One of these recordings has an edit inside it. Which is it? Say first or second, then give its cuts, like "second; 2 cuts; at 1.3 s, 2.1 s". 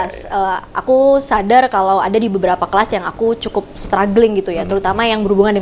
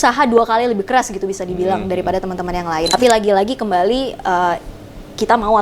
second; 1 cut; at 2.9 s